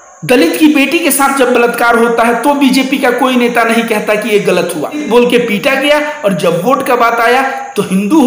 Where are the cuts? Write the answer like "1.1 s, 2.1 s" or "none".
5.0 s